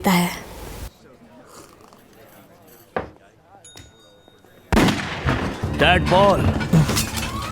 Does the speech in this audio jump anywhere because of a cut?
yes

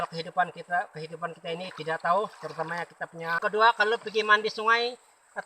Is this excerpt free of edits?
no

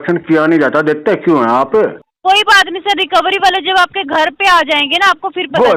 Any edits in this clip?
yes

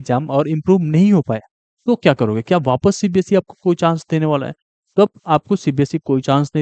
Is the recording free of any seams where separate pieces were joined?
yes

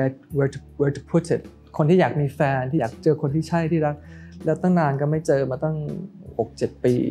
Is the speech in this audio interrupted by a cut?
yes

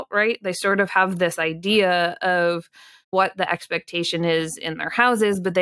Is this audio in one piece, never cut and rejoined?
no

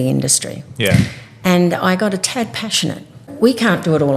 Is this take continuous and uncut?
no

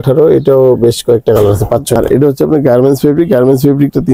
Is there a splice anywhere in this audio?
yes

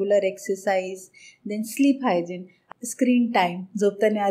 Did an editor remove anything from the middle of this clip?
yes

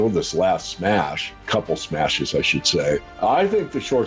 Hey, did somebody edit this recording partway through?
yes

